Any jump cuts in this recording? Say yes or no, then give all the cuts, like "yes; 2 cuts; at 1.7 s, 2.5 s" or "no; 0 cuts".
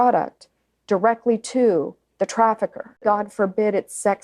yes; 1 cut; at 3.0 s